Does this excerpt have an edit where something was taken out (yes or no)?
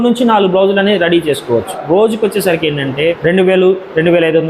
yes